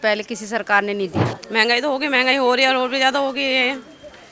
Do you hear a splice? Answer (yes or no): yes